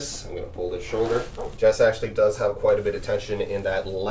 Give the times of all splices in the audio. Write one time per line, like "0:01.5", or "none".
0:01.4